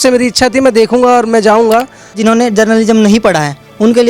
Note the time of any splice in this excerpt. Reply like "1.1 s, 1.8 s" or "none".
2.2 s